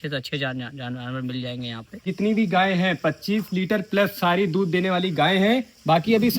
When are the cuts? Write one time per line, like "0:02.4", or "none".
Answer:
0:02.0